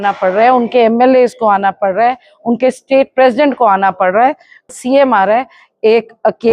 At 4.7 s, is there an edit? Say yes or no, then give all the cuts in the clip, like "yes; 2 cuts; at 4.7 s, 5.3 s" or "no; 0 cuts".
yes; 1 cut; at 4.7 s